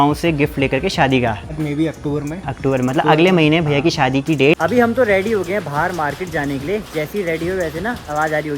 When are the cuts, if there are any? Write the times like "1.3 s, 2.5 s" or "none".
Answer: 1.5 s, 4.6 s